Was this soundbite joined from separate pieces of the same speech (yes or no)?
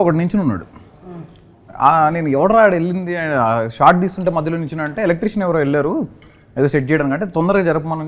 no